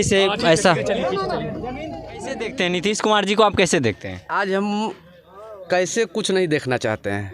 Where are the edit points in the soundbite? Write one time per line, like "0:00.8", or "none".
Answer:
0:02.5